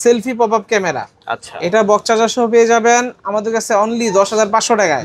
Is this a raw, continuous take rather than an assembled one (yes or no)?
yes